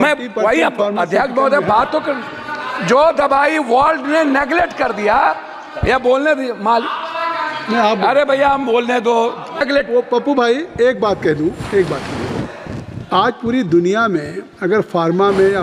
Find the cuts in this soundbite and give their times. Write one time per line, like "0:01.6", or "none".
0:09.6